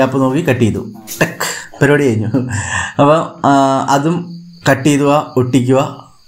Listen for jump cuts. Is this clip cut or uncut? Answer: uncut